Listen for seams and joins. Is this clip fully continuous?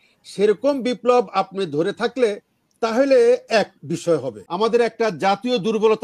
no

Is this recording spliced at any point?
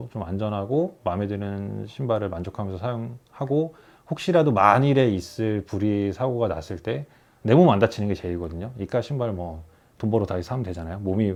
no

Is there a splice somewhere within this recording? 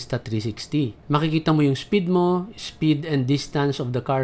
yes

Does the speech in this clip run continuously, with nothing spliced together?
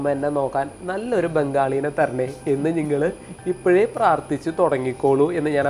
yes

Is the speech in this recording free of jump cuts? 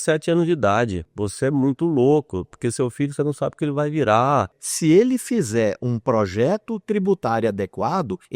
no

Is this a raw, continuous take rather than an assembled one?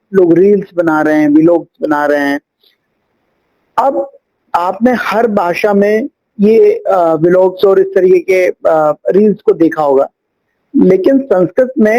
yes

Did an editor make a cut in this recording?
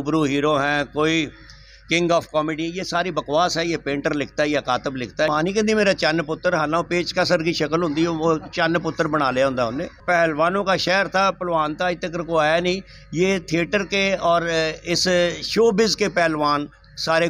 yes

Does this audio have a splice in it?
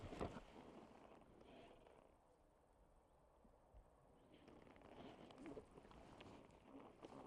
no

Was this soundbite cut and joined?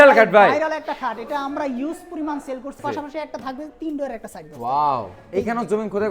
yes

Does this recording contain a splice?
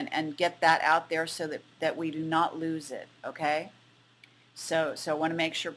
no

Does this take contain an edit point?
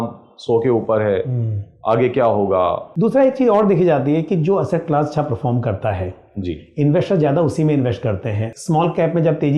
yes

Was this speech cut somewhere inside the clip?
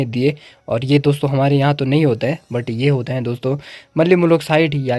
no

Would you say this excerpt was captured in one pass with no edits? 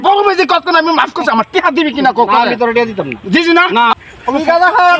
no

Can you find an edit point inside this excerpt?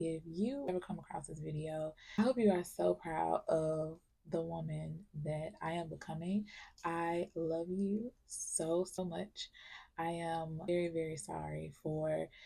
yes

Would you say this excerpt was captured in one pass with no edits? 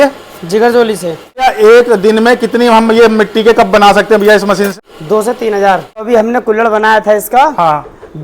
no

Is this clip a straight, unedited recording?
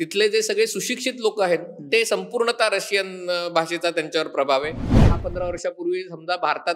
no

